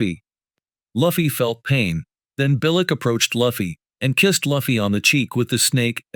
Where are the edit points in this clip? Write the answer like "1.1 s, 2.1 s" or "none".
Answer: none